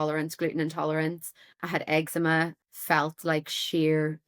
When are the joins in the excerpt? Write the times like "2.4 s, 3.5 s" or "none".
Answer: 2.6 s